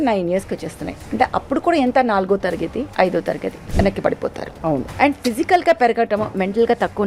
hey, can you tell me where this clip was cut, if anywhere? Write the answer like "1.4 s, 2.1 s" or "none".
2.9 s, 3.6 s, 4.9 s